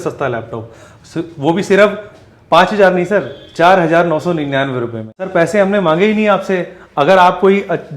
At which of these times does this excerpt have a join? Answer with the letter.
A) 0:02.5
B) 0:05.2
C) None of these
B